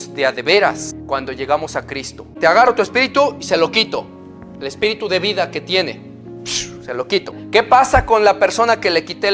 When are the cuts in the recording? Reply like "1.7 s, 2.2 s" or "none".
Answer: 0.9 s, 2.3 s, 7.4 s